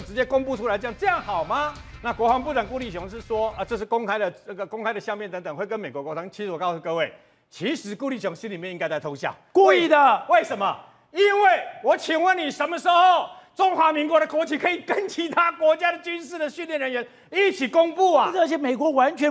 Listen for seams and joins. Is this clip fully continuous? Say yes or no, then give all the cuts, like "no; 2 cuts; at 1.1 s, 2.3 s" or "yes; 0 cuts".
yes; 0 cuts